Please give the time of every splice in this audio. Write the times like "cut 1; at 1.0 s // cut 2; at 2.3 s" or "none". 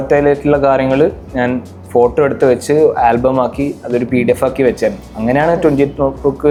none